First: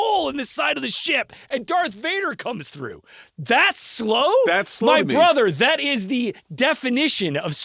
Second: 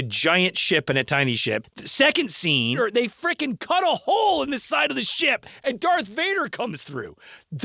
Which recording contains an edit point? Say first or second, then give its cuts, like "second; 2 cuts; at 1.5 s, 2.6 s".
second; 2 cuts; at 1.7 s, 2.8 s